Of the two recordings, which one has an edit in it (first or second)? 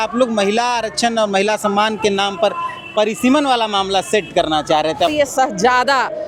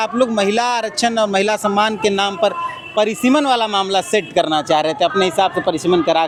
first